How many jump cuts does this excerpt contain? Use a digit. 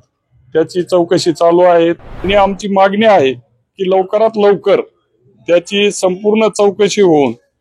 1